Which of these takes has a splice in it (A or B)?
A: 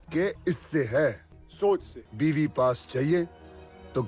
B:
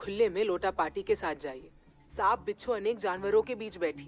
A